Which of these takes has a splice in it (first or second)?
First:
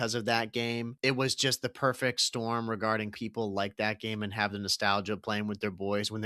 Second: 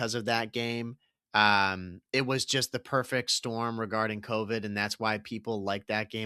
first